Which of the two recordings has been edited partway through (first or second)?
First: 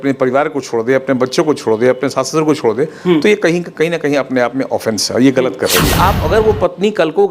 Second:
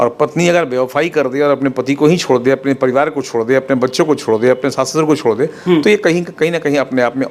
first